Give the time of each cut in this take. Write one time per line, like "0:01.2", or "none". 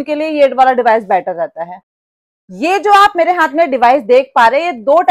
0:01.9